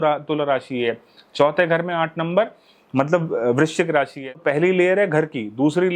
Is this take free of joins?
no; 1 cut; at 4.2 s

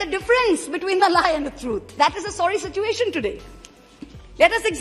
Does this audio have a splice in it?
no; 0 cuts

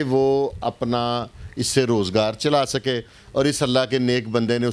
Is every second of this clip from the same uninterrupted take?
yes; 0 cuts

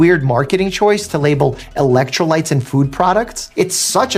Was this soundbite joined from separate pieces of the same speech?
no; 0 cuts

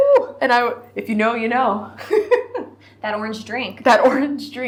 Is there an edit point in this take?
no; 0 cuts

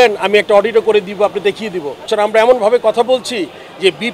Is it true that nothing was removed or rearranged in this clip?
no; 1 cut; at 2.1 s

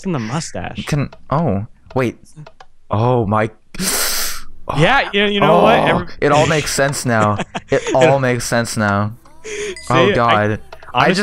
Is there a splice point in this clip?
yes; 1 cut; at 5.8 s

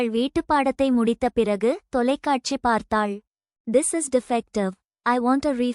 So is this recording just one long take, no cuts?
no; 1 cut; at 3.5 s

